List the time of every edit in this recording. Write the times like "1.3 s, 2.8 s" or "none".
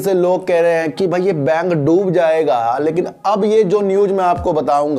none